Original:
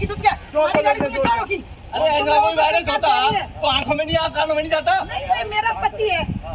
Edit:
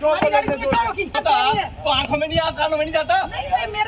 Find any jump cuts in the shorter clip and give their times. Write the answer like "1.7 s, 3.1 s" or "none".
1.1 s